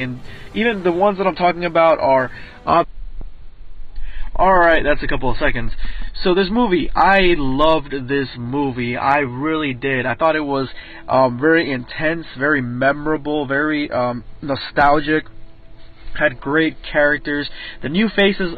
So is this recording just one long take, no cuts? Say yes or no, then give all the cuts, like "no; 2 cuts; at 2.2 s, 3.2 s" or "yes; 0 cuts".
yes; 0 cuts